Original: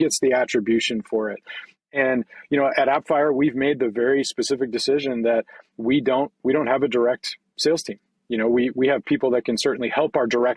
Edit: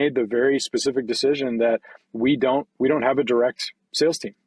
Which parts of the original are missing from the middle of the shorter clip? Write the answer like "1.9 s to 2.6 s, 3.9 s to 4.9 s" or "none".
none